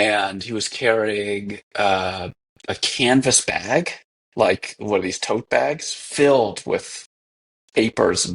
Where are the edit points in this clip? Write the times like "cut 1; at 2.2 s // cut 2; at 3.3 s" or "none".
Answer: none